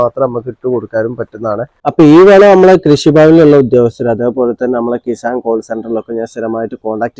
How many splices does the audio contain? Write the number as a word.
one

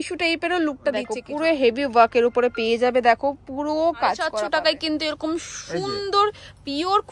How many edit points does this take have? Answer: two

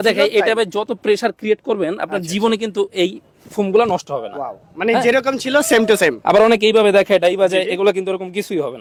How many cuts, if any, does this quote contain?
zero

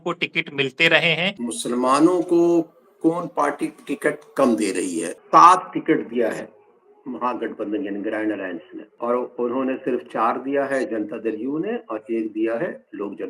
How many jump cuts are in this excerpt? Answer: three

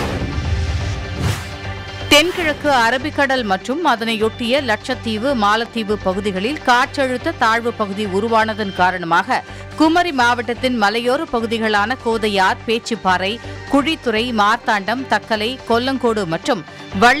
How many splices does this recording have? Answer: one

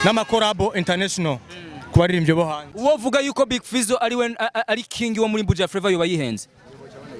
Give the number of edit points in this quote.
one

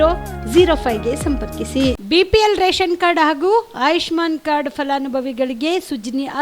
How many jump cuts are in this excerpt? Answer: one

